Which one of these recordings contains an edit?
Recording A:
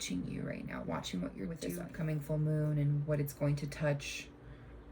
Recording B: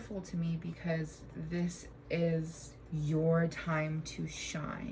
A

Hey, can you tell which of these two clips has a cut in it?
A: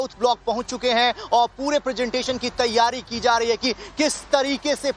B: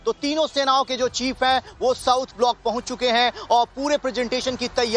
B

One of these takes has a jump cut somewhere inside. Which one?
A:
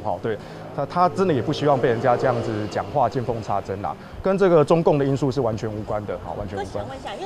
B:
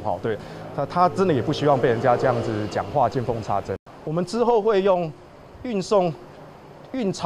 B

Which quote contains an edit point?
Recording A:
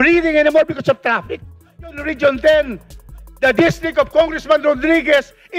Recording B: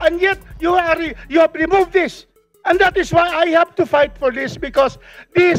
A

